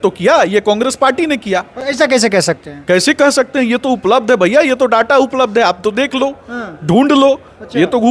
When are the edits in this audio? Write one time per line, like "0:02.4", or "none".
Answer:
none